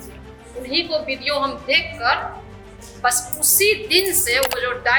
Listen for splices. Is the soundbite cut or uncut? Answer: uncut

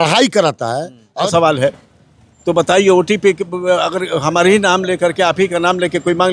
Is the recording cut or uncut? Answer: cut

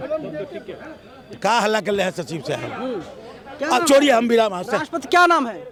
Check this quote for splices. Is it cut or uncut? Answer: uncut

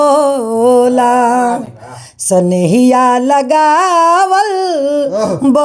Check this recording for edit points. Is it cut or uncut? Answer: uncut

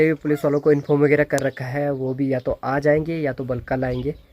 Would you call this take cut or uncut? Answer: uncut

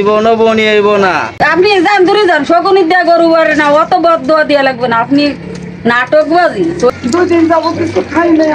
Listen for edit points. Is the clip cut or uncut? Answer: cut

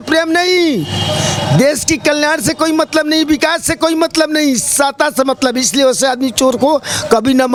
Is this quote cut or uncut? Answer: uncut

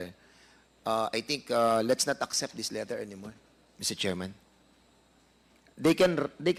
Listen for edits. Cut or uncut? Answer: uncut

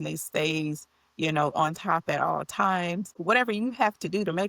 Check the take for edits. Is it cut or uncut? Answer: cut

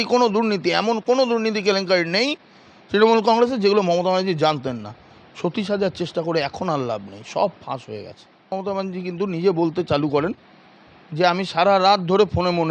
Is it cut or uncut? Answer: cut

